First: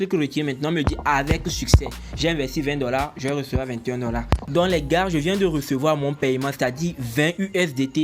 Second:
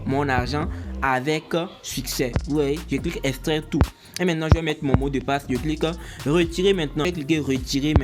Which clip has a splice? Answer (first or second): second